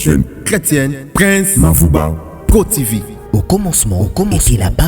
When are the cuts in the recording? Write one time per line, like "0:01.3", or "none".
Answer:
0:03.3

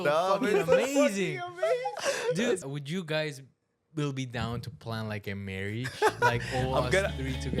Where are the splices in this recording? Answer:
0:02.6

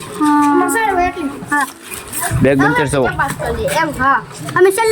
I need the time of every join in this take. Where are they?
0:02.3

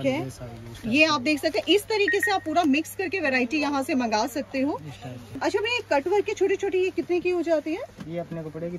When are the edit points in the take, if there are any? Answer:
0:05.3

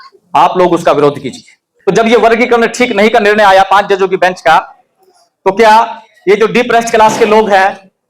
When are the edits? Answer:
0:01.6

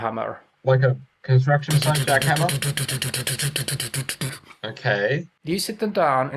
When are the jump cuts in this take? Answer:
0:05.3

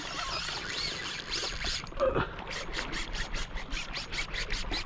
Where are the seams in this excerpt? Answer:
0:02.4

